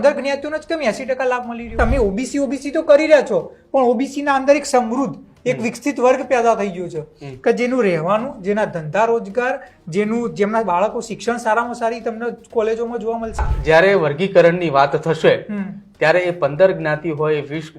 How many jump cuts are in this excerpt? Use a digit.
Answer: 2